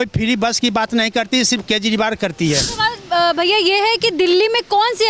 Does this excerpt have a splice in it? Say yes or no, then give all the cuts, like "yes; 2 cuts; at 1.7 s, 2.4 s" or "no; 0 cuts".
yes; 1 cut; at 2.7 s